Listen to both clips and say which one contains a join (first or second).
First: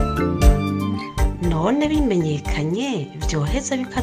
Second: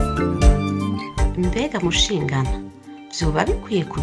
second